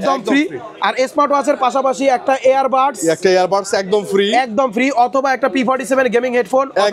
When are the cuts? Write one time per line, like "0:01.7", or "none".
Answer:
none